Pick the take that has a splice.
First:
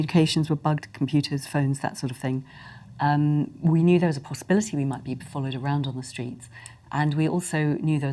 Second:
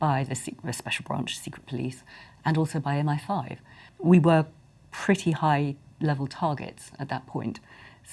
second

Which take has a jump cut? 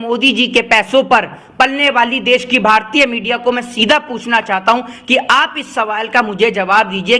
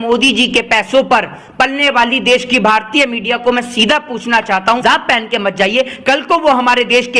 second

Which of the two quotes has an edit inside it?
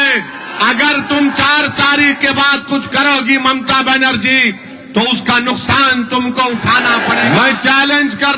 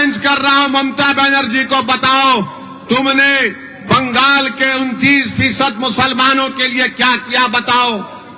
first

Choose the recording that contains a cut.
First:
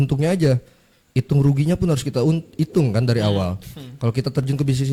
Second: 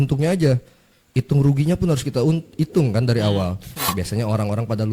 second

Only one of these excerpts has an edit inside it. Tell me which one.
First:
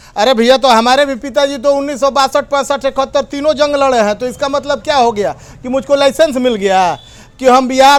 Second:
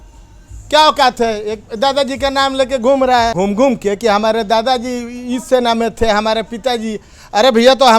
second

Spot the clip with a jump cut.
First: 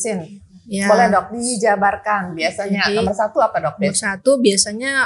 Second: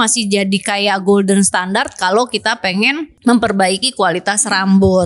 second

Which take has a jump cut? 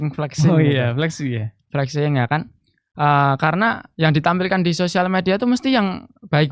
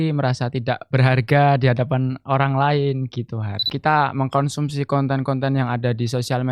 second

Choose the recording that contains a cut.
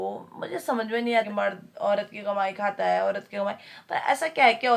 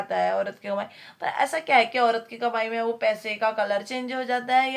first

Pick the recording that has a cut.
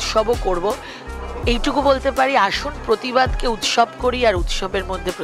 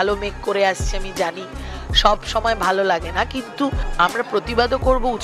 second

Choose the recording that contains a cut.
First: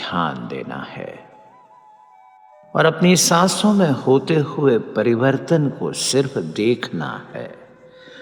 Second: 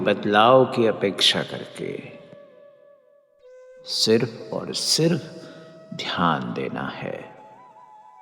second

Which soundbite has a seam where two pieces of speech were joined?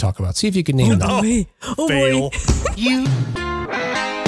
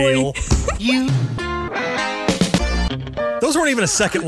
second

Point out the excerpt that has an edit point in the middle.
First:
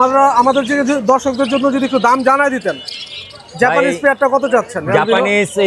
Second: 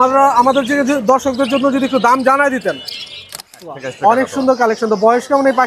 second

